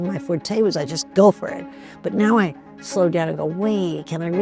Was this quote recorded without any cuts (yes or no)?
yes